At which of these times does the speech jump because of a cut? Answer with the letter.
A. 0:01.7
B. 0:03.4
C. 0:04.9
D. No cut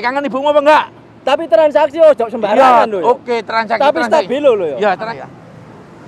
C